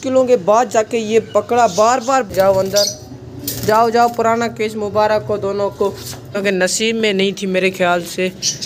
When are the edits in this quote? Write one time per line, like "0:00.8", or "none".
0:02.3
0:06.3

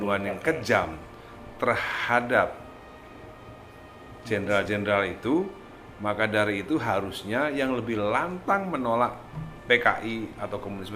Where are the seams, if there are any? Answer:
none

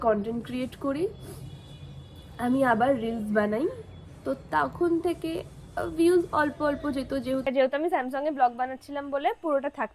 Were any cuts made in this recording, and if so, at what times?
0:07.4

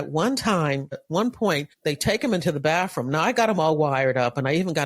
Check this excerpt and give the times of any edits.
0:01.0
0:01.7

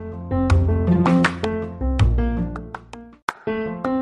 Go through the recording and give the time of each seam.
0:03.0

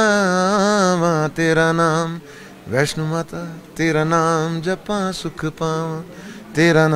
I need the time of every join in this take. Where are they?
none

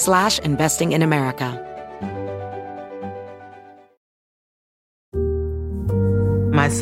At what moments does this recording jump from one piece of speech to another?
0:01.5

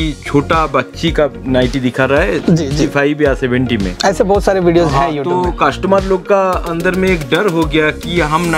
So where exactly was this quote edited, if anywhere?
none

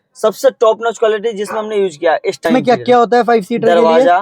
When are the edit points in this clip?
0:02.4

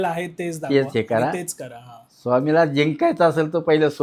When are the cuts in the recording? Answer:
none

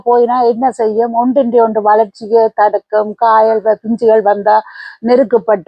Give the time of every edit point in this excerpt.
none

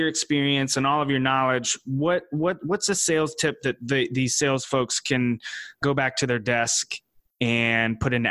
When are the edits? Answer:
0:05.8

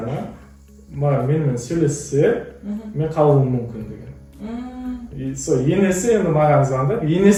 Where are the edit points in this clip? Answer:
none

